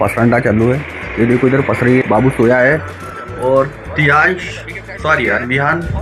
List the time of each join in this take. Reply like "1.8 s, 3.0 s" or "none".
none

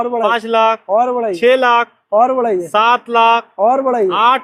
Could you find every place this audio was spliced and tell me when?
none

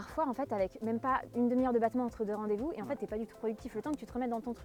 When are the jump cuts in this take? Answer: none

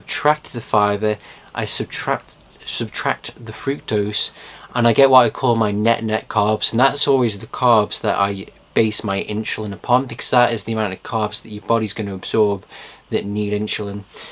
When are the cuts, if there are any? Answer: 4.4 s

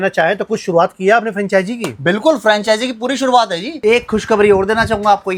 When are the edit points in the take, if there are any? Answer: none

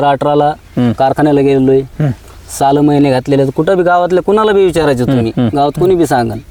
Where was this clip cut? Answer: none

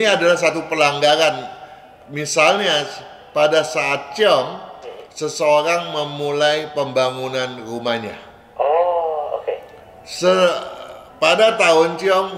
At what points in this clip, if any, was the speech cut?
none

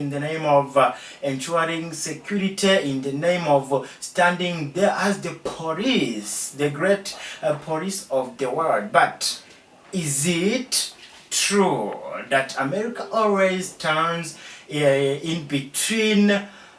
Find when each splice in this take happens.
none

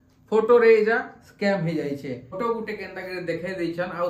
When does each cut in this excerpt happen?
2.3 s

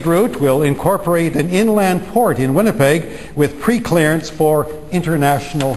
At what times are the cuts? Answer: none

